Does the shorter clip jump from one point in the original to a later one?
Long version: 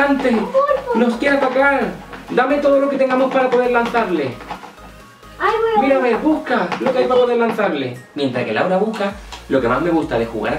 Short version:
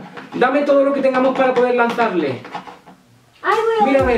no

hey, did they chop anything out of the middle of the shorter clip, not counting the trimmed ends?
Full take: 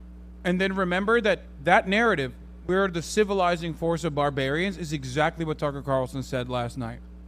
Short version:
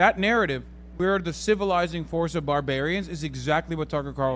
no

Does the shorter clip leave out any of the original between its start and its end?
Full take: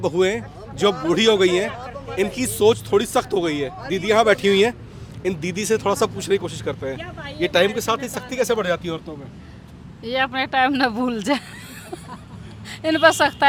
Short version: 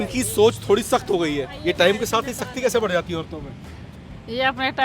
yes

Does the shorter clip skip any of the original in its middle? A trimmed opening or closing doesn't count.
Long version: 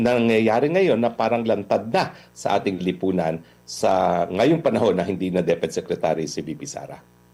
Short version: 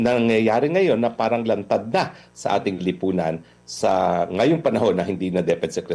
no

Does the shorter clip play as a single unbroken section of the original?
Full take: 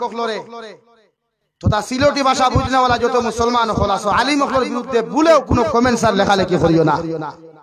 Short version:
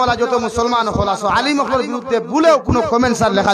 yes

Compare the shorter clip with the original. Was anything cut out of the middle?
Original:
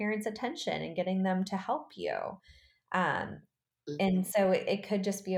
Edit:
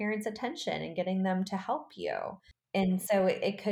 yes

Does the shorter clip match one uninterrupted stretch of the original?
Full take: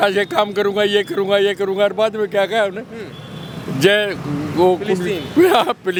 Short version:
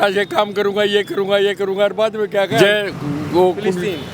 no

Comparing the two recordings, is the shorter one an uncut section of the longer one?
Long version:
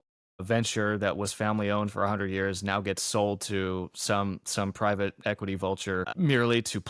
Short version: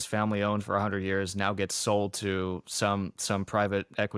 yes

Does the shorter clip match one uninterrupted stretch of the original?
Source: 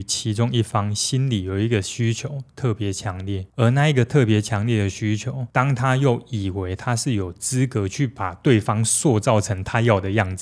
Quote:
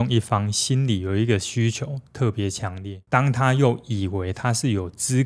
no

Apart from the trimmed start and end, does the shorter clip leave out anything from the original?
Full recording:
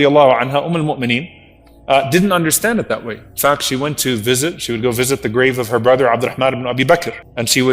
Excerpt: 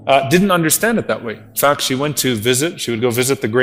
no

